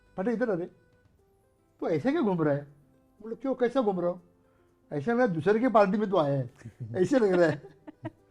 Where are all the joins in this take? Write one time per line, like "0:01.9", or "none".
none